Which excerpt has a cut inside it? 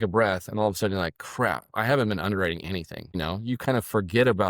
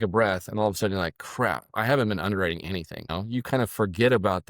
second; 1 cut; at 3.0 s

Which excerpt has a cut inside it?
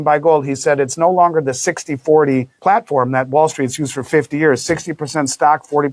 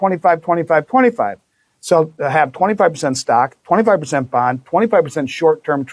first; 1 cut; at 2.5 s

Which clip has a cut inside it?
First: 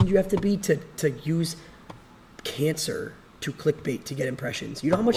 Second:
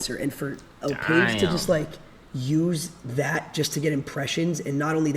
second; 1 cut; at 3.7 s

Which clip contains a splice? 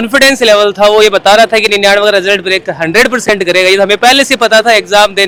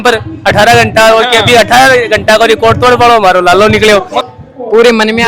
second; 1 cut; at 4.1 s

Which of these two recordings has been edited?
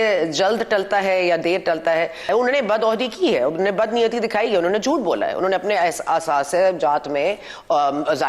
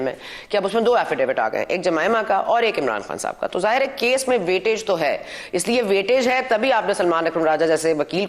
first; 1 cut; at 2.3 s

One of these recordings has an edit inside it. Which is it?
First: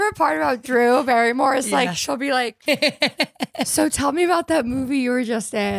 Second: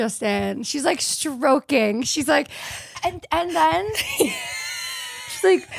first; 1 cut; at 2.6 s

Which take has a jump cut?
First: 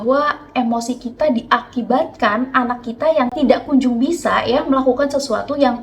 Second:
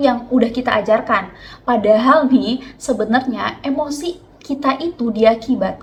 first; 1 cut; at 3.4 s

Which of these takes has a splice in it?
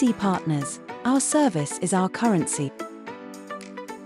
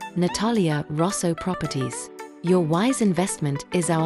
first; 1 cut; at 2.7 s

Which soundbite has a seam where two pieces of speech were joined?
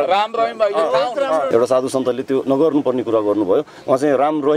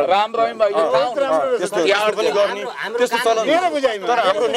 first; 1 cut; at 1.5 s

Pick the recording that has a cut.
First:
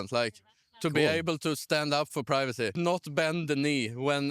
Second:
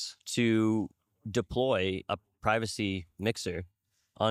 first; 1 cut; at 2.7 s

